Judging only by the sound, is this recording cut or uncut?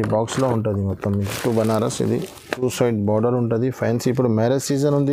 cut